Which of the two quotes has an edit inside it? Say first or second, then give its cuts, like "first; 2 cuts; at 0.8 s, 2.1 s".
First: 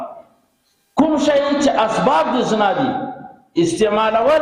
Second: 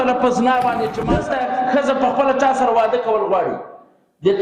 second; 1 cut; at 1.1 s